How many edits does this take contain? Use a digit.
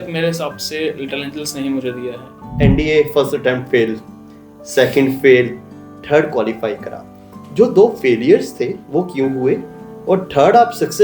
1